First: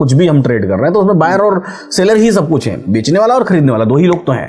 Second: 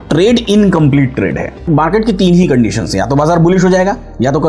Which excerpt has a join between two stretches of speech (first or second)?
second